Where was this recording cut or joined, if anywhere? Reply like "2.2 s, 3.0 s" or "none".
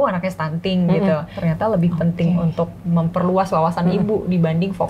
1.4 s